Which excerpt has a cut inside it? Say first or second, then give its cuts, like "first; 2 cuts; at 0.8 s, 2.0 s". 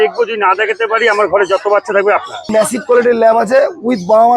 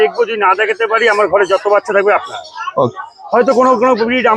first; 1 cut; at 2.5 s